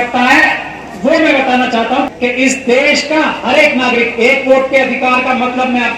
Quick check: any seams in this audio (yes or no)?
yes